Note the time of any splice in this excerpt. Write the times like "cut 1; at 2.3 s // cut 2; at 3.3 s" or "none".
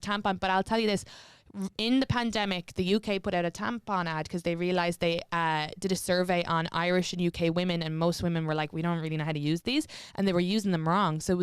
none